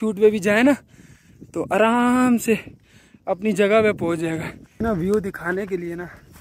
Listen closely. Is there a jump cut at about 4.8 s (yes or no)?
yes